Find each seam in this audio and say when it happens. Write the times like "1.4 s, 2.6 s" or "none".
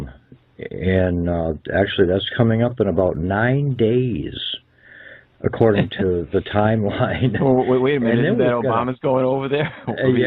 2.3 s